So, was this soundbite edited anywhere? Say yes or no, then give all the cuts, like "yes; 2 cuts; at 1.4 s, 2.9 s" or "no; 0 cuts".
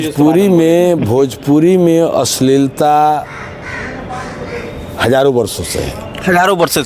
no; 0 cuts